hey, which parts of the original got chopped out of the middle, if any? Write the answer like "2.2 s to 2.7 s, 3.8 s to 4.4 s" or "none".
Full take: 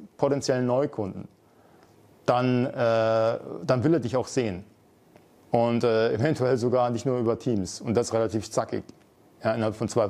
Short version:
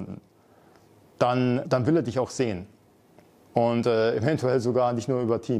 2.7 s to 3.6 s